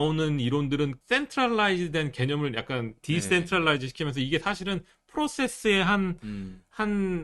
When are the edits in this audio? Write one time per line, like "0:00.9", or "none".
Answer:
0:01.0